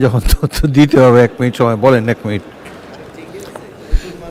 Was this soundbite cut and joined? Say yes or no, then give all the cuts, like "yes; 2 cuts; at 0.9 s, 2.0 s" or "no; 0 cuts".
no; 0 cuts